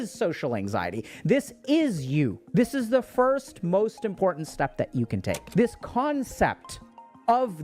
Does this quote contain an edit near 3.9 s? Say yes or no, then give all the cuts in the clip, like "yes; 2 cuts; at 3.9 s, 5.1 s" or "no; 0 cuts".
no; 1 cut; at 5.4 s